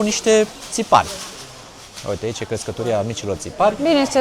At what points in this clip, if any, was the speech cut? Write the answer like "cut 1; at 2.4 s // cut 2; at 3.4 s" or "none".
none